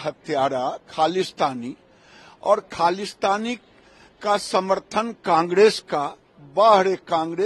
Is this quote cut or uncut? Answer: uncut